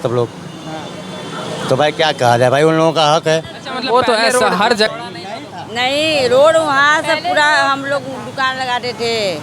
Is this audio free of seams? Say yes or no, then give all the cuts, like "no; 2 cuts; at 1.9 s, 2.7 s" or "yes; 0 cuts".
no; 1 cut; at 4.9 s